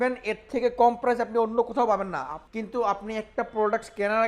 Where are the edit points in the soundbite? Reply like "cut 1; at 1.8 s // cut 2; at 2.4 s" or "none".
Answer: cut 1; at 2.4 s